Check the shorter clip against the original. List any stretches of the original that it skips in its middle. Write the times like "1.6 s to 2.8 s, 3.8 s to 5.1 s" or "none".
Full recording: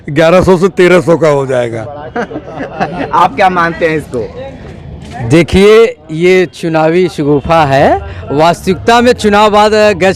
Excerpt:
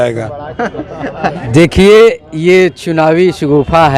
3.0 s to 5.2 s

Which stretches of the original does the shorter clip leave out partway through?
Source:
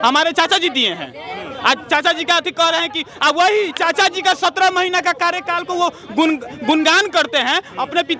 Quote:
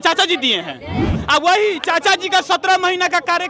1.5 s to 3.1 s

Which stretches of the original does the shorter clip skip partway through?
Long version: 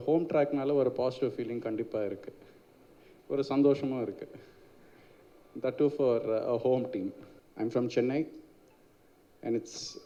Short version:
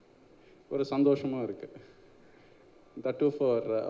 none

